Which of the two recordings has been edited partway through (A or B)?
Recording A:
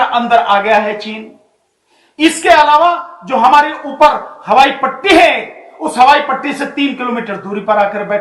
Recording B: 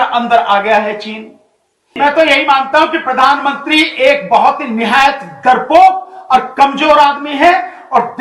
B